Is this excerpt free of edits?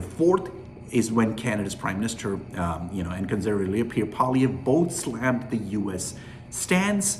yes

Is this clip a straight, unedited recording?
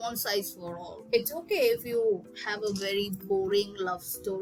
yes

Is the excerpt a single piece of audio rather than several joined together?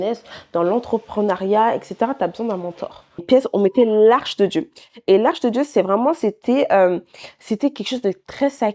no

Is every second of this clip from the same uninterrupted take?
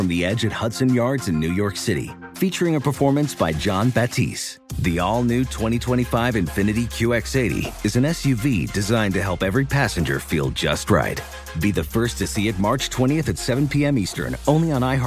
yes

